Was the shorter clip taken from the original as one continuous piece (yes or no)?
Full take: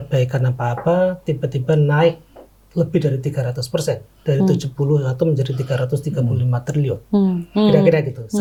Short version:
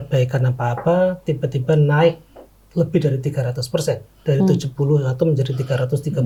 yes